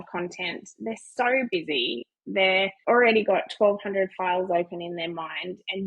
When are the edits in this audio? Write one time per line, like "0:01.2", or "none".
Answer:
0:02.8